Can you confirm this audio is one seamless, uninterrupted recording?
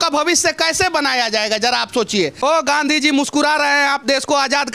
no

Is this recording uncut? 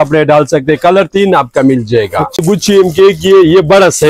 no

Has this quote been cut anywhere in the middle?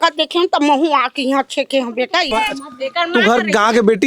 yes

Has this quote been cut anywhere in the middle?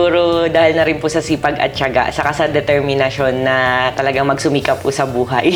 no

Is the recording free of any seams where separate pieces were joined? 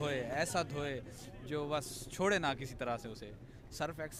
yes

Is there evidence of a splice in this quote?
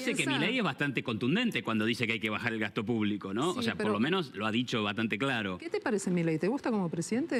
no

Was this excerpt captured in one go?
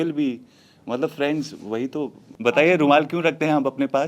no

